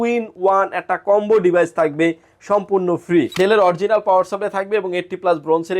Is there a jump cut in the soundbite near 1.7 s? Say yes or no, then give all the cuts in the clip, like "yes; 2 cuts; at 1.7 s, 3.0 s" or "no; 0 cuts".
no; 1 cut; at 3.4 s